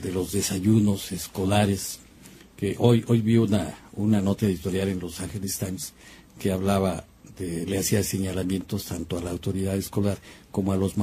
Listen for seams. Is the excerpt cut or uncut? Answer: cut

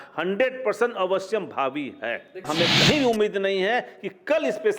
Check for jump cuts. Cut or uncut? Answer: cut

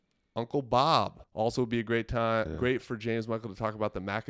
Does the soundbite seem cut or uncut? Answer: uncut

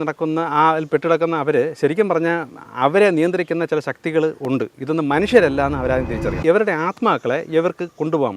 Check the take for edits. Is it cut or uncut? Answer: cut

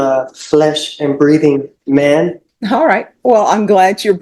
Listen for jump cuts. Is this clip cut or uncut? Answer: cut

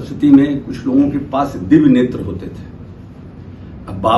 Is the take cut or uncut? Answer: uncut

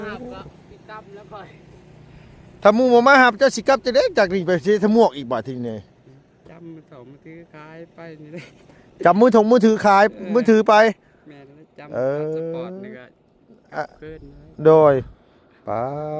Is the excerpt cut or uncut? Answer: uncut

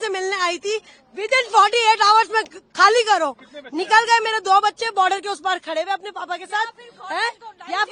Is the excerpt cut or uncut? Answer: uncut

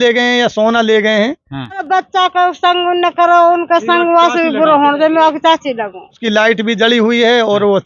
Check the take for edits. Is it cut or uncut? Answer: cut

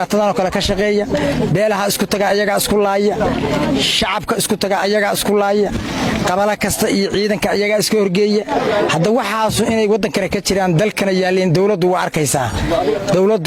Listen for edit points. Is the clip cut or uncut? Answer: uncut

